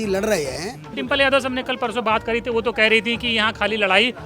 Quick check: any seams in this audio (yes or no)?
yes